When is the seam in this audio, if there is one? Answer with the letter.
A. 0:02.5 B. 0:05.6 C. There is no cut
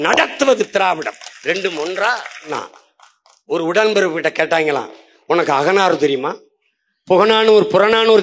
A